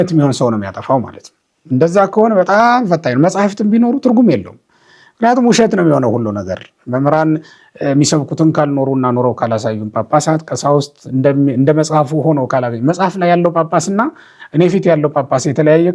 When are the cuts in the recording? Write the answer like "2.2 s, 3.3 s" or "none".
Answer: none

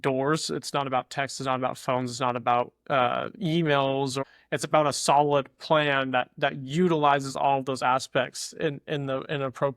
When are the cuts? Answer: 4.2 s

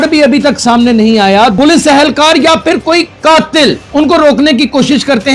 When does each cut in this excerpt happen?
1.5 s, 3.8 s

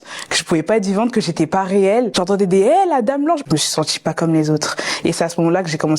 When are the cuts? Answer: 2.1 s, 3.4 s

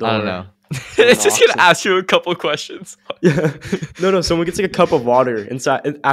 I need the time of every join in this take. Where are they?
1.0 s

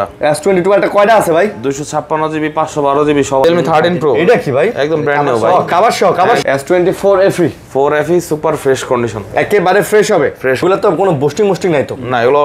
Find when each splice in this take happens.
3.4 s, 6.4 s, 10.6 s

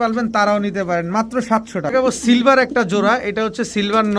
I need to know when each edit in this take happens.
1.9 s

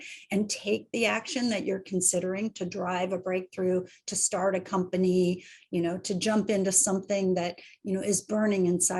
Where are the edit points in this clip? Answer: none

